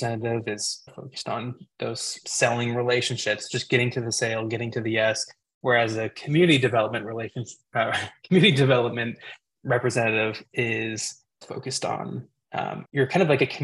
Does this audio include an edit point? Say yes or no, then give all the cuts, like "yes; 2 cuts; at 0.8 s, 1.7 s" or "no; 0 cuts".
no; 0 cuts